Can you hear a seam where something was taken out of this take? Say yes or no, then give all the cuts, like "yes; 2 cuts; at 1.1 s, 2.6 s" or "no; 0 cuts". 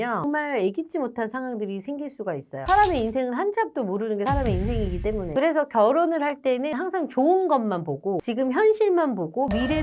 no; 0 cuts